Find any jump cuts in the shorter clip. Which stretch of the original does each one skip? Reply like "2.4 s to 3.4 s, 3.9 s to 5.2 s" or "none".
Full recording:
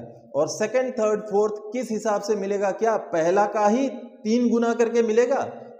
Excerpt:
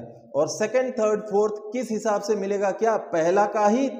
none